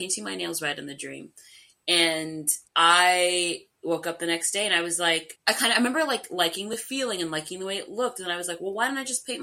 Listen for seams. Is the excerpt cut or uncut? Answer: uncut